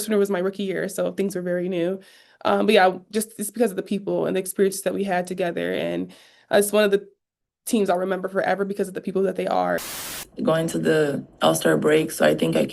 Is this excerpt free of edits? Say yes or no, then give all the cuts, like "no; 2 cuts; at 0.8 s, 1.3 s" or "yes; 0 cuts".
no; 1 cut; at 10.2 s